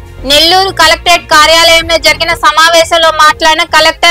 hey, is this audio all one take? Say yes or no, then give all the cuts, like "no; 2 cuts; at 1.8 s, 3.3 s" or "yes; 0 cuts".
yes; 0 cuts